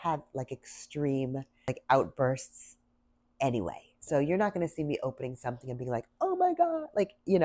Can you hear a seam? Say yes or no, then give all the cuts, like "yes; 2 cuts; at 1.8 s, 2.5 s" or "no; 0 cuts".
yes; 1 cut; at 1.7 s